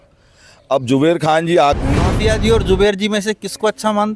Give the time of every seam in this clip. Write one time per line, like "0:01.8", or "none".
0:01.8